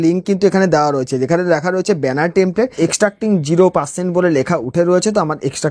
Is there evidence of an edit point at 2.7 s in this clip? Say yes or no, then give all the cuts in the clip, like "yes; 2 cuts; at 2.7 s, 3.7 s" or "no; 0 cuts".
yes; 1 cut; at 2.7 s